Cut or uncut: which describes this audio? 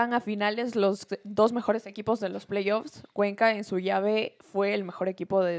uncut